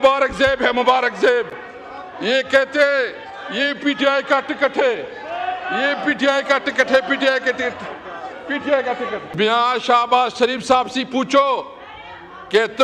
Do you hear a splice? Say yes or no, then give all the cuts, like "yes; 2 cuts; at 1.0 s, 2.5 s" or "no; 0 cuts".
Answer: no; 0 cuts